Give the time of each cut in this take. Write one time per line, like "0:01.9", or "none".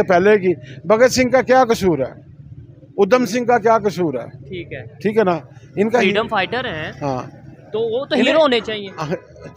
none